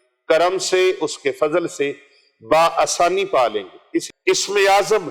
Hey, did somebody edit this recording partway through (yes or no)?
yes